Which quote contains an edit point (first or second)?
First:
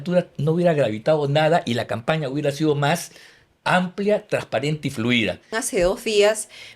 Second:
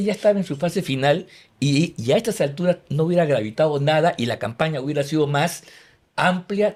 first